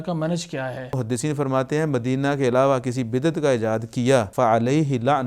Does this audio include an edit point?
yes; 2 cuts; at 1.0 s, 4.3 s

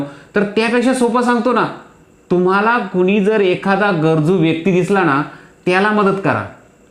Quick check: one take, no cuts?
yes; 0 cuts

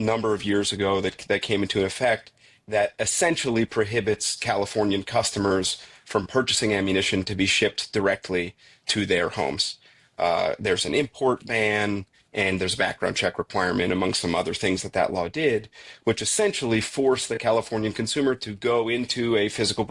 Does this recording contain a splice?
no; 0 cuts

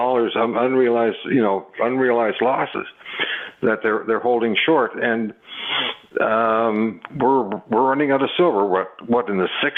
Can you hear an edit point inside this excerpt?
no; 0 cuts

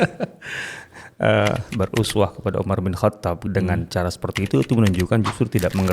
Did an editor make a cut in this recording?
yes; 2 cuts; at 1.7 s, 3.4 s

